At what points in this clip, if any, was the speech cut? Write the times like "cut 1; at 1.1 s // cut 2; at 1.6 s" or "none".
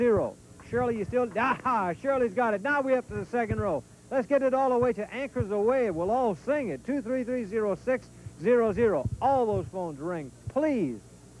cut 1; at 7.8 s